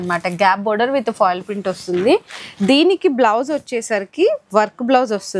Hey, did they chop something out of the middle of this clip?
no; 0 cuts

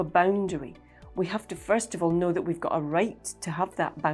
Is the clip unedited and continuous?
yes; 0 cuts

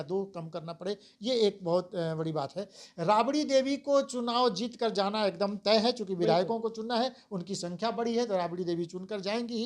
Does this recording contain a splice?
no; 0 cuts

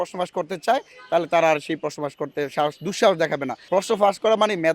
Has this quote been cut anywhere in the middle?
yes; 1 cut; at 3.5 s

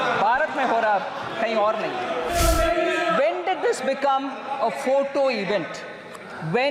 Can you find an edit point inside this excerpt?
yes; 1 cut; at 2.3 s

